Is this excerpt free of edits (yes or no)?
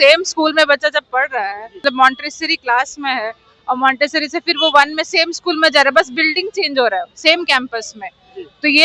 no